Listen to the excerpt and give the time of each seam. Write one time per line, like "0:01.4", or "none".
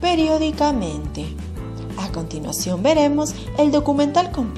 0:03.1